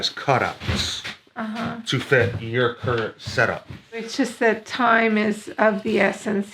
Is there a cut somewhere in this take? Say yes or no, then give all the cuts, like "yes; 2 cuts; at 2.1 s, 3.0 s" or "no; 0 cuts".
yes; 1 cut; at 4.1 s